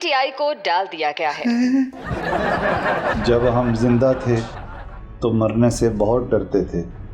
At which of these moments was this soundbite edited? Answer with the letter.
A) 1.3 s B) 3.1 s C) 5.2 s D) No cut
B